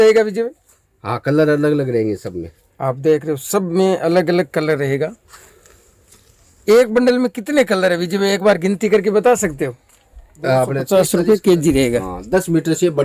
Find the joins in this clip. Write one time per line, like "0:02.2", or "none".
0:10.8